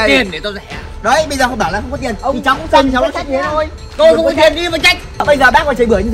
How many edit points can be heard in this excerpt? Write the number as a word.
one